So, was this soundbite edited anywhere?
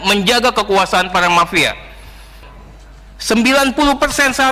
yes; 1 cut; at 2.4 s

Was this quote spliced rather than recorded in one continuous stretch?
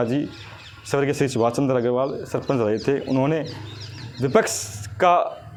no; 0 cuts

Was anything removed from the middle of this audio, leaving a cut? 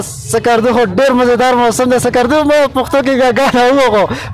no; 0 cuts

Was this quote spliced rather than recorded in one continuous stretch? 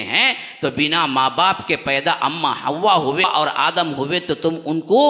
yes; 1 cut; at 3.2 s

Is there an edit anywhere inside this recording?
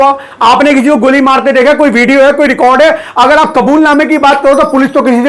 no; 0 cuts

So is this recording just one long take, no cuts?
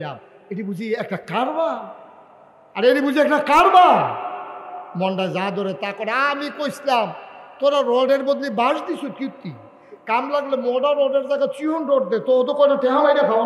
yes; 0 cuts

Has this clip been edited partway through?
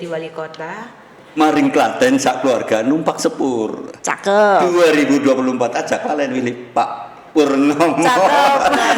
yes; 1 cut; at 1.3 s

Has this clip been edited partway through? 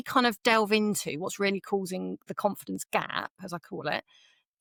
no; 0 cuts

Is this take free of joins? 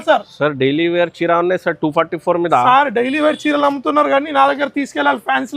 yes; 0 cuts

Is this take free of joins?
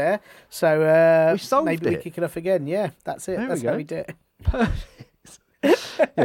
yes; 0 cuts

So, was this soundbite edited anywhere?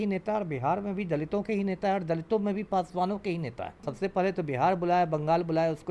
yes; 1 cut; at 3.9 s

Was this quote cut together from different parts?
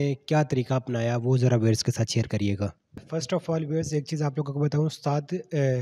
yes; 1 cut; at 3.0 s

